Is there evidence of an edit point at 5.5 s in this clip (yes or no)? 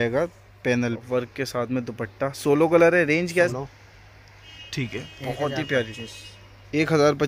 no